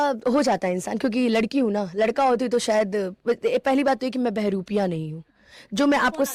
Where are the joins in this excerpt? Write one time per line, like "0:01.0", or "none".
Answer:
none